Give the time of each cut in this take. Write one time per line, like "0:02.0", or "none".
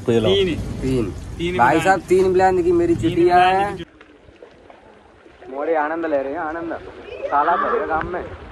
0:03.8